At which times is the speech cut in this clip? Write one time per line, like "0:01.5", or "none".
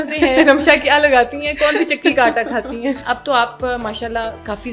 0:03.0